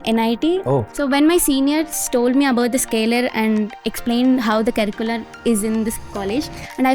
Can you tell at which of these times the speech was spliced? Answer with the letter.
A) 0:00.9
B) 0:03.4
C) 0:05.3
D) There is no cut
A